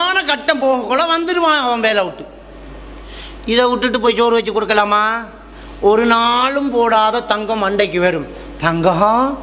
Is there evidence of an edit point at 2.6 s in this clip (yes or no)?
no